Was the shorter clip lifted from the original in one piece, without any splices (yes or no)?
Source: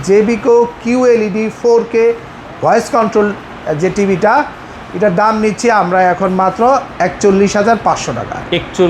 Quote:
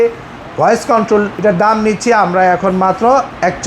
no